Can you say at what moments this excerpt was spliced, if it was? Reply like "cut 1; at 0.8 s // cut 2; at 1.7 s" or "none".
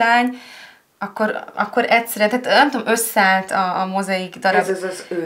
none